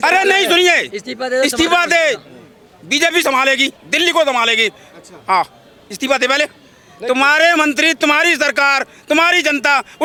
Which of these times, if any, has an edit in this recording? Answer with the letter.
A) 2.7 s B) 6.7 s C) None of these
C